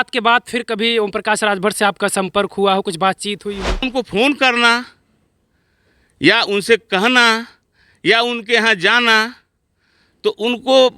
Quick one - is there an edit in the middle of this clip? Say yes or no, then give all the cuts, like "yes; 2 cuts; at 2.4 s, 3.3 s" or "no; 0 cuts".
yes; 1 cut; at 3.8 s